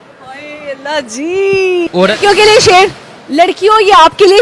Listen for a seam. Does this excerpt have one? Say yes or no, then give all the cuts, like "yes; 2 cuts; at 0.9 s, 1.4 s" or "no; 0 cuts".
yes; 1 cut; at 1.9 s